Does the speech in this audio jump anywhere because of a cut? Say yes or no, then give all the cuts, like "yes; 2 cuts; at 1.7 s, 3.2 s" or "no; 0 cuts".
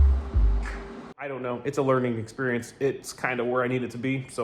yes; 1 cut; at 1.3 s